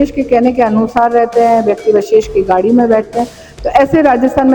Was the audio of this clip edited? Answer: no; 0 cuts

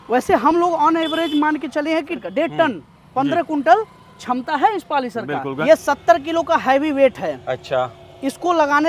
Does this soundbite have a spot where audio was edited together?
yes; 2 cuts; at 2.2 s, 5.5 s

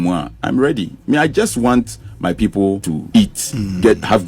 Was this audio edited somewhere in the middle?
yes; 1 cut; at 2.9 s

